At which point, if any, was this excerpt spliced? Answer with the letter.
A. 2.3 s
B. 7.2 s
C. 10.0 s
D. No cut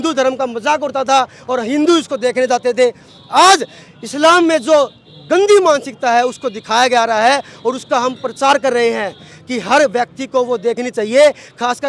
D